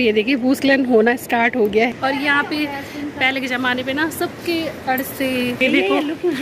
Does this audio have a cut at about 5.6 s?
yes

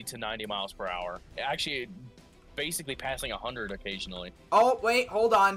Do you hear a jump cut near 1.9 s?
no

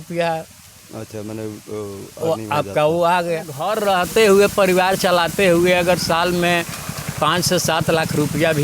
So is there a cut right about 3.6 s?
yes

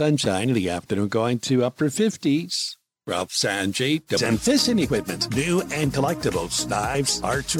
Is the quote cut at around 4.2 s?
yes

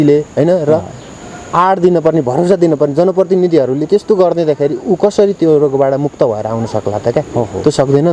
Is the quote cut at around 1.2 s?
no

